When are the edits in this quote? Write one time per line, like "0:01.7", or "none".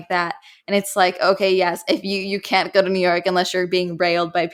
none